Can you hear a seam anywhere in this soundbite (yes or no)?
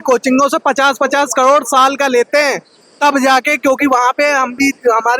no